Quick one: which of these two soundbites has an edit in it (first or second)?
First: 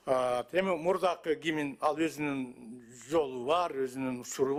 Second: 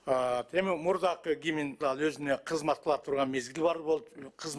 second